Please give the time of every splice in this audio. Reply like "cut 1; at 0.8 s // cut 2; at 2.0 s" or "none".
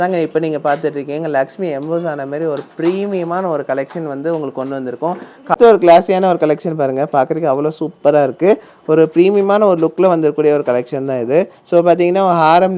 none